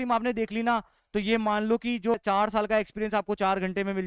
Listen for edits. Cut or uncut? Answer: cut